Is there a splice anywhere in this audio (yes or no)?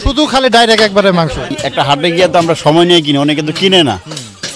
yes